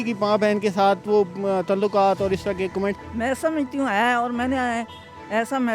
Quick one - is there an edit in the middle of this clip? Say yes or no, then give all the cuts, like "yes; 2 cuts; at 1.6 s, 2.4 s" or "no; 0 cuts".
yes; 1 cut; at 3.1 s